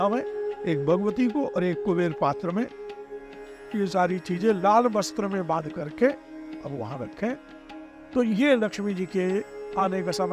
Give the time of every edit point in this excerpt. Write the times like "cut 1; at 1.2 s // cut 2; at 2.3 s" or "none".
cut 1; at 8.1 s